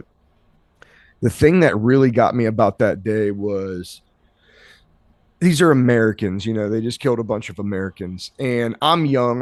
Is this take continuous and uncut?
yes; 0 cuts

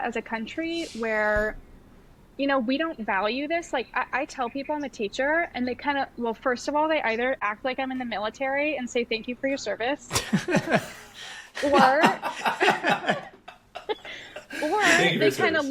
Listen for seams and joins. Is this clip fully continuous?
yes; 0 cuts

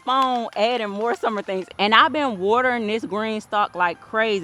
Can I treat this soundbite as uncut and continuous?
no; 1 cut; at 1.7 s

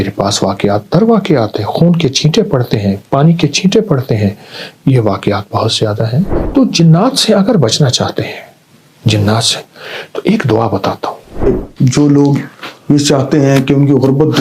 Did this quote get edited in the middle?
yes; 2 cuts; at 6.4 s, 11.4 s

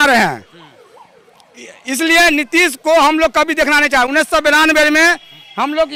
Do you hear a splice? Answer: no; 0 cuts

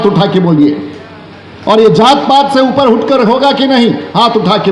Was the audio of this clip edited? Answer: no; 0 cuts

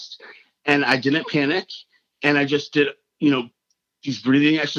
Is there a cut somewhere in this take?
no; 0 cuts

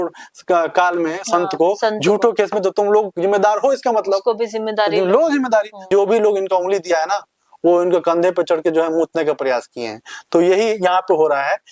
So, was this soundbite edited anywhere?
yes; 1 cut; at 5.8 s

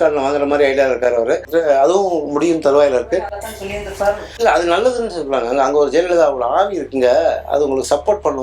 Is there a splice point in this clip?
yes; 1 cut; at 1.4 s

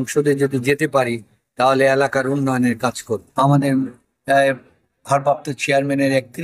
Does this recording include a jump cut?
yes; 1 cut; at 3.2 s

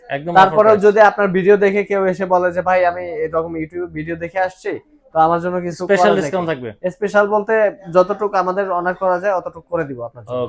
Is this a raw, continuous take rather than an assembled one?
yes; 0 cuts

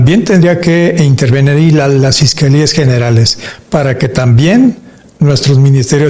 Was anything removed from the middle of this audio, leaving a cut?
yes; 1 cut; at 3.5 s

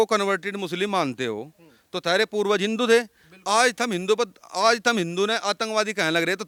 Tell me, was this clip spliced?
no; 0 cuts

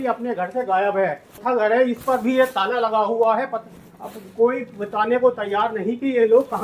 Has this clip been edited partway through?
yes; 1 cut; at 1.3 s

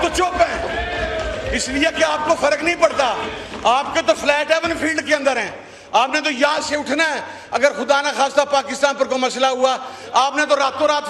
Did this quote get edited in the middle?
no; 0 cuts

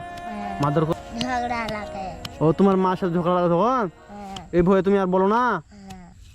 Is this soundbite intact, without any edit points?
no; 1 cut; at 0.9 s

